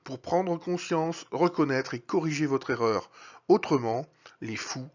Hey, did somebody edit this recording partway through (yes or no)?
yes